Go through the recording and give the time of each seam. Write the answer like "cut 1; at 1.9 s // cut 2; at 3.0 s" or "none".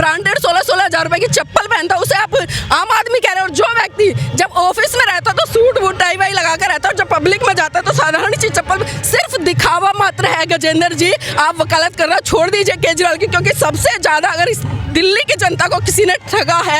none